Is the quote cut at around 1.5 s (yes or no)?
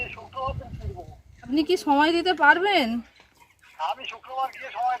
yes